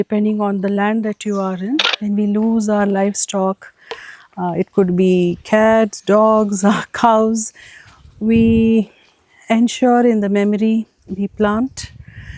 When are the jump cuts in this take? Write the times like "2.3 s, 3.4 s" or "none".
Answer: 1.9 s